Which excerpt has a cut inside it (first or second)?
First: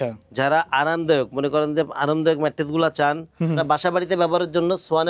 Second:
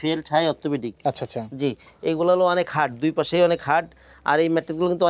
first